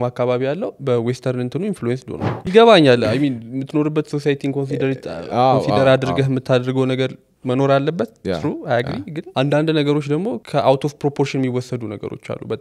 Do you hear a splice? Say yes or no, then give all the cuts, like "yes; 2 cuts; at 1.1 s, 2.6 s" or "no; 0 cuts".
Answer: yes; 3 cuts; at 2.3 s, 9.2 s, 10.4 s